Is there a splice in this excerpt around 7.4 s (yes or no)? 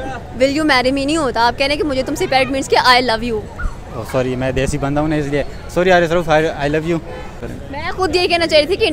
yes